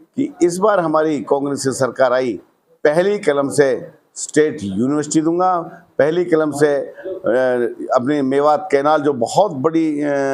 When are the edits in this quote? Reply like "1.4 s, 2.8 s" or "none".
none